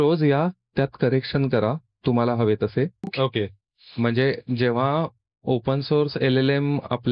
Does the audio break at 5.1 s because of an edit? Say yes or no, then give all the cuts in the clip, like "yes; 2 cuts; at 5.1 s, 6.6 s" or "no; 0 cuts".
no; 1 cut; at 3.1 s